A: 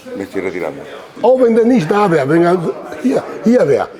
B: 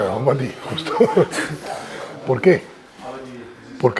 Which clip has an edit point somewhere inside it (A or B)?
A